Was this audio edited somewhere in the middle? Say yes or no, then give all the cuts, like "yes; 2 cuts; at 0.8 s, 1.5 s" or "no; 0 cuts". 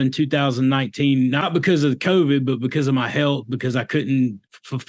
yes; 1 cut; at 1.5 s